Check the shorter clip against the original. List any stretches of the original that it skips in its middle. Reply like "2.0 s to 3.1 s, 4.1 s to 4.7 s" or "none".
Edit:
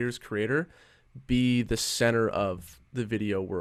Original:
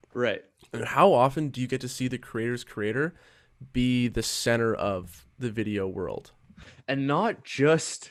none